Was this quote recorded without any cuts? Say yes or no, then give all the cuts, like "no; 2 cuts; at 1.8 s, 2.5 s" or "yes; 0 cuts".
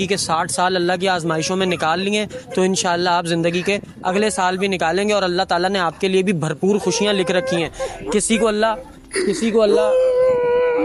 yes; 0 cuts